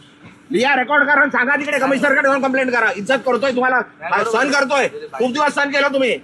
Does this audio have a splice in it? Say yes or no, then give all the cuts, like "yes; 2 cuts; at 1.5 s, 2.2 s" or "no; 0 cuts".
no; 0 cuts